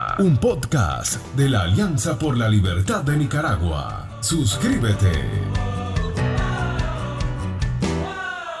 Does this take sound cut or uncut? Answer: uncut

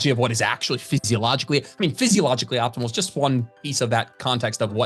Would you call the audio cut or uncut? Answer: uncut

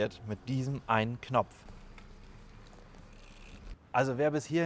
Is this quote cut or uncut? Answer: cut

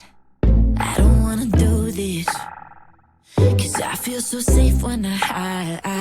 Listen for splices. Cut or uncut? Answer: cut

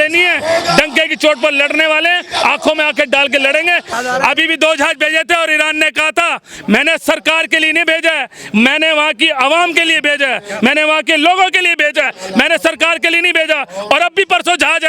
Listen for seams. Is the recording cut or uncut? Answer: cut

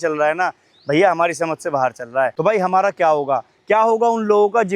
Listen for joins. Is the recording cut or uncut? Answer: cut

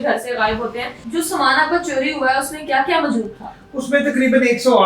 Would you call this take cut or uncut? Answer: cut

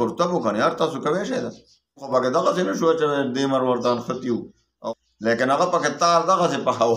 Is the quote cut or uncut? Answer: cut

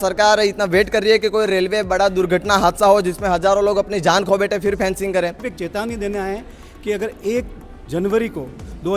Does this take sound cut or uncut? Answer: cut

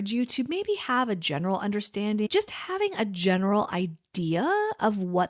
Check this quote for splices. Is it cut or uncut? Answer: cut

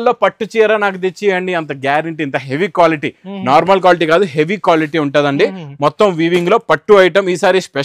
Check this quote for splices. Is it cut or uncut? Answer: uncut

